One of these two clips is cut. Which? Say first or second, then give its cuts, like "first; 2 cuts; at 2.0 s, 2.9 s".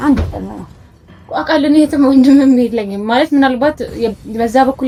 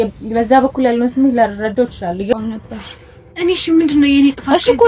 second; 1 cut; at 2.3 s